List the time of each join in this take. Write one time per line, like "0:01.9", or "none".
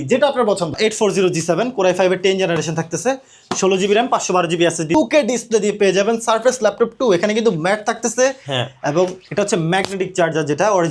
0:00.8
0:04.9